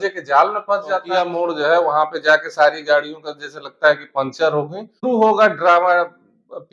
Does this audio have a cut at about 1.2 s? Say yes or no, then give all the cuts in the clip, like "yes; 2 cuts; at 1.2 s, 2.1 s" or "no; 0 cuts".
yes; 2 cuts; at 1.2 s, 5.0 s